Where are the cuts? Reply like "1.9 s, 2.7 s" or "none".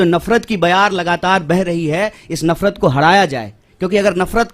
none